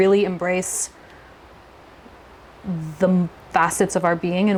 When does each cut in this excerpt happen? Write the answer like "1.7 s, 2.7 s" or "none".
none